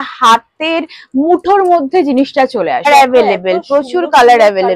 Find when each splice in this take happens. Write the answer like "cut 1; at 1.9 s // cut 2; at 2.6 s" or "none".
cut 1; at 2.9 s